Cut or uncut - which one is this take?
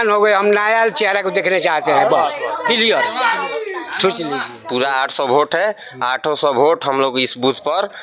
cut